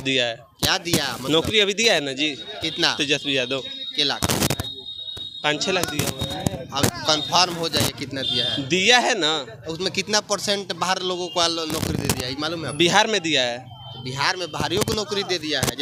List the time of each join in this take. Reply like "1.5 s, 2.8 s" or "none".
none